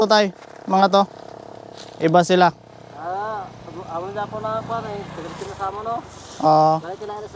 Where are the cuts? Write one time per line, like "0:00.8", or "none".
none